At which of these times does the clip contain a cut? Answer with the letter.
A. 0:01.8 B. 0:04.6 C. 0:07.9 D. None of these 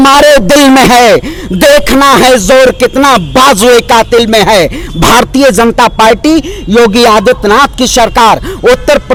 D